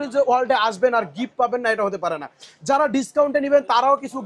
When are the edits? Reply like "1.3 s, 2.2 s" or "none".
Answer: none